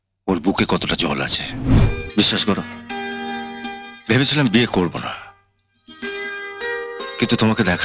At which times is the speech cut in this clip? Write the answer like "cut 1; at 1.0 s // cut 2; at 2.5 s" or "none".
cut 1; at 1.8 s